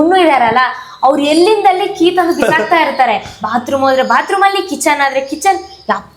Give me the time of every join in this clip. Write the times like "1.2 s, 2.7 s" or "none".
none